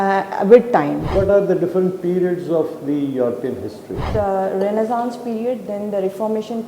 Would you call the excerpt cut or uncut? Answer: cut